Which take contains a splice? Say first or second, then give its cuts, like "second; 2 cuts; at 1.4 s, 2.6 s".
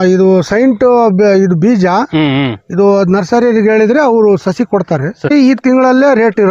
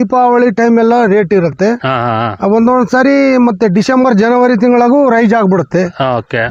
first; 1 cut; at 5.3 s